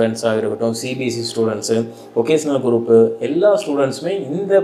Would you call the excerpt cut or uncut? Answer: uncut